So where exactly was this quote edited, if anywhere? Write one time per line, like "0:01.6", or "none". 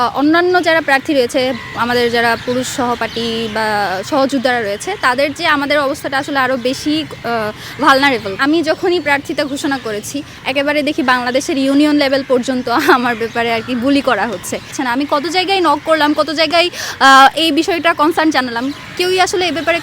0:08.4
0:14.7